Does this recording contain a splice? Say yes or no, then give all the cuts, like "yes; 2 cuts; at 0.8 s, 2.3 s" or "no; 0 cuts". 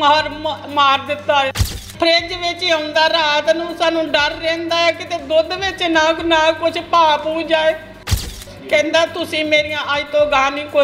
yes; 2 cuts; at 1.9 s, 8.3 s